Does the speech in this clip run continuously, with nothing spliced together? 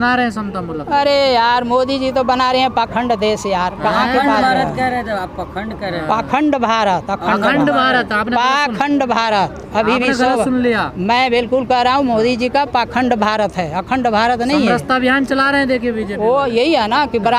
yes; 0 cuts

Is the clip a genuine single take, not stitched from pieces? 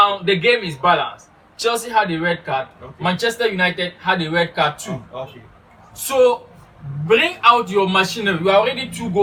yes; 0 cuts

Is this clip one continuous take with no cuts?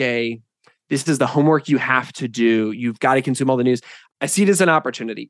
yes; 0 cuts

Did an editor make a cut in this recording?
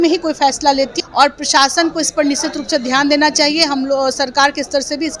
yes; 1 cut; at 1.0 s

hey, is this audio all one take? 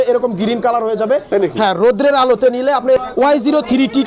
no; 1 cut; at 3.0 s

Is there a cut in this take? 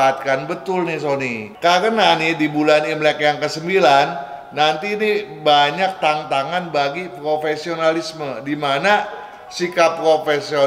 yes; 1 cut; at 1.4 s

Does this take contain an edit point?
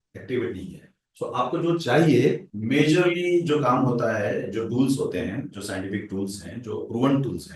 yes; 1 cut; at 2.5 s

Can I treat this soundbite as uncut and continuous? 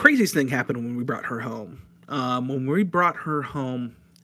yes; 0 cuts

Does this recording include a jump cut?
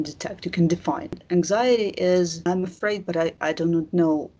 yes; 1 cut; at 1.2 s

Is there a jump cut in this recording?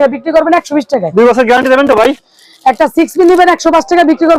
no; 0 cuts

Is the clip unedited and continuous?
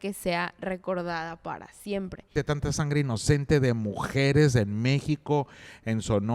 no; 1 cut; at 2.3 s

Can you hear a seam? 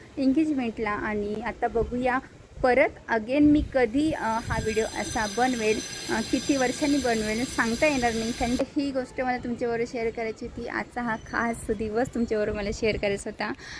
no; 0 cuts

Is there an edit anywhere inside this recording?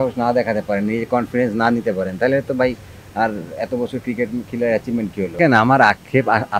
yes; 1 cut; at 5.4 s

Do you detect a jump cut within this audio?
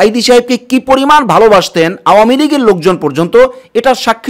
no; 0 cuts

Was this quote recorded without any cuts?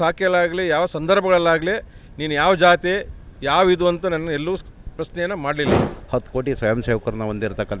no; 1 cut; at 5.9 s

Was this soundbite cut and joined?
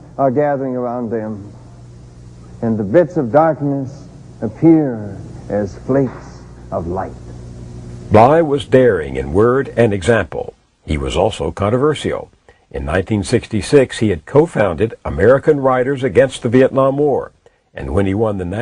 no; 0 cuts

